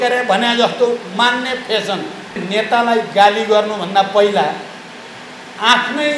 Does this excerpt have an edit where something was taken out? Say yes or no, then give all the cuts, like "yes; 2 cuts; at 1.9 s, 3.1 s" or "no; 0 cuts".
yes; 1 cut; at 2.4 s